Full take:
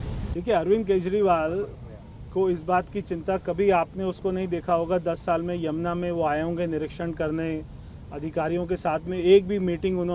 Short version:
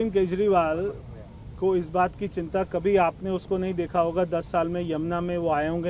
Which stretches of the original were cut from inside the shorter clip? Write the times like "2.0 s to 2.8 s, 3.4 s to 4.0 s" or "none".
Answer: none